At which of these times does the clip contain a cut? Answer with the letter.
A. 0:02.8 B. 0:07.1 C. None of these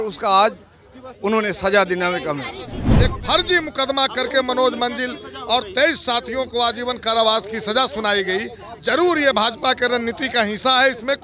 A